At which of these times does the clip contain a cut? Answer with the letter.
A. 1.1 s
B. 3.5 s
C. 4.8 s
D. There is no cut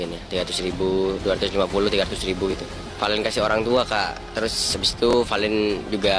D